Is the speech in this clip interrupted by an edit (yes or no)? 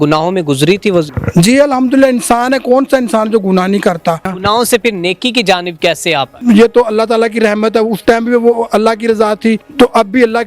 yes